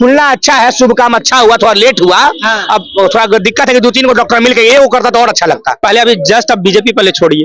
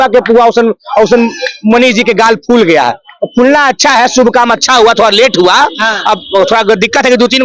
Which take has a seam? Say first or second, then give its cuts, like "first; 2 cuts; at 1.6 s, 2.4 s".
first; 1 cut; at 5.8 s